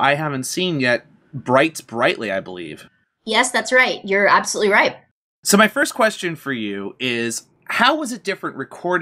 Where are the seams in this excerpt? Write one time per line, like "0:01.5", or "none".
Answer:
0:08.1